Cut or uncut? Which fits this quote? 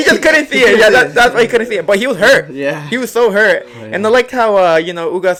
uncut